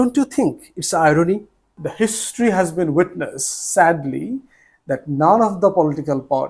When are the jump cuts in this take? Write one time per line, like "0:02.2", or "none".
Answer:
0:01.7